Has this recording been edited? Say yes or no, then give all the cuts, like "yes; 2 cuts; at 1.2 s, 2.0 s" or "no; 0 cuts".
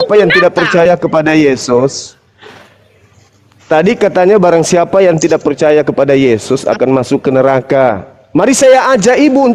no; 0 cuts